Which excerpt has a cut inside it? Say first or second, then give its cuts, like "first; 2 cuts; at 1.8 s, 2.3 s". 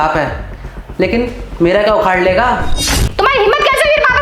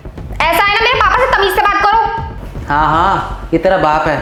first; 1 cut; at 3.0 s